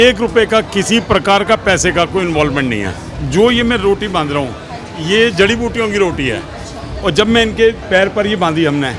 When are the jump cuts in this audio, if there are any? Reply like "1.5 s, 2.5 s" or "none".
3.1 s, 7.8 s